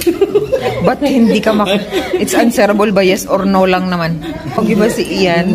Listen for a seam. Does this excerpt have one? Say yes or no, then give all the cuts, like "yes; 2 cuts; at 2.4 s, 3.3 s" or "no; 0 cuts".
yes; 1 cut; at 4.6 s